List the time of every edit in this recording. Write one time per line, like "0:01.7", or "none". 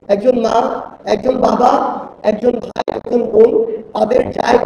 none